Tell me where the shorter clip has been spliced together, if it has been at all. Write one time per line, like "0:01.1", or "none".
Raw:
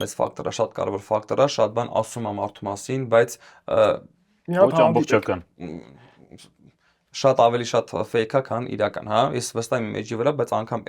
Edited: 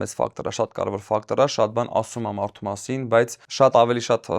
0:03.4